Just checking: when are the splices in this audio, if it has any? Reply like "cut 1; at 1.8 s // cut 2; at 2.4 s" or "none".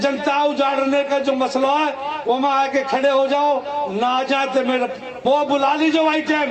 none